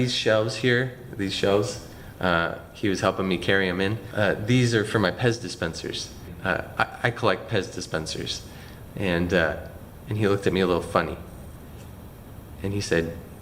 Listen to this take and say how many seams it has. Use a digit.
0